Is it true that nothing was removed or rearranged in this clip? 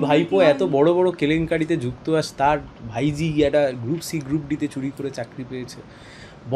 yes; 0 cuts

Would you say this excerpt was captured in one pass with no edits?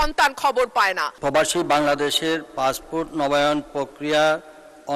no; 1 cut; at 1.1 s

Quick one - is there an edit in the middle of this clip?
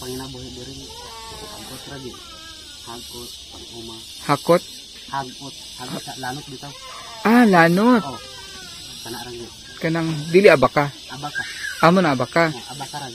no; 0 cuts

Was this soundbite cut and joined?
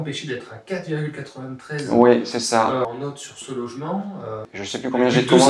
yes; 2 cuts; at 2.8 s, 4.5 s

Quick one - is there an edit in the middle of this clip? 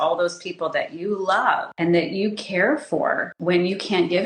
yes; 2 cuts; at 1.7 s, 3.3 s

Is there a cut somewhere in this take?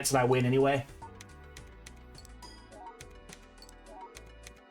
yes; 1 cut; at 0.9 s

